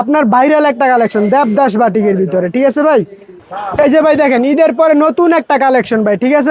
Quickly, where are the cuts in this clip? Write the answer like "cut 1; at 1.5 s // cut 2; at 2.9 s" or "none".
cut 1; at 3.4 s